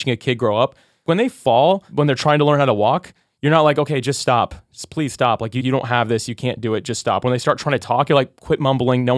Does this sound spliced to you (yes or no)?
yes